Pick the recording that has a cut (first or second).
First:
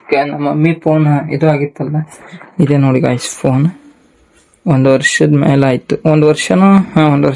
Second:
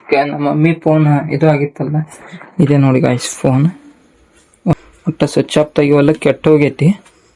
second